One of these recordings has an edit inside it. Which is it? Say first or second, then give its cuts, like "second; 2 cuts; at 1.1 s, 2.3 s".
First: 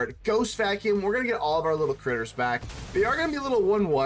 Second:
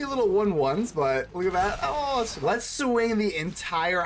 second; 1 cut; at 2.3 s